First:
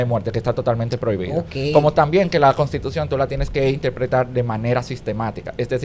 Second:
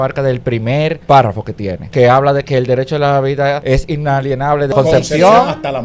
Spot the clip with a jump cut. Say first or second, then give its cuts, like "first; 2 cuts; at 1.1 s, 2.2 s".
second; 4 cuts; at 1.0 s, 1.7 s, 3.6 s, 4.7 s